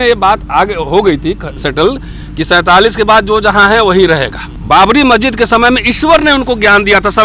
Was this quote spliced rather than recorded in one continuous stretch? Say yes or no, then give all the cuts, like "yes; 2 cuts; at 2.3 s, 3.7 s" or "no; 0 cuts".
yes; 1 cut; at 4.6 s